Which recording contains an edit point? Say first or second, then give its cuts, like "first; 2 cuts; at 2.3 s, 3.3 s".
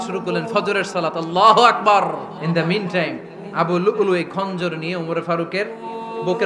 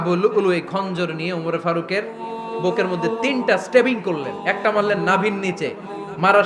first; 1 cut; at 2.4 s